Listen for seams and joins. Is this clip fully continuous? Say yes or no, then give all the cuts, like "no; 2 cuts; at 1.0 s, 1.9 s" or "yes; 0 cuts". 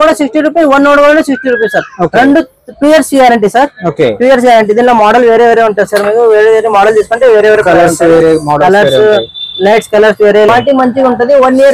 no; 1 cut; at 10.5 s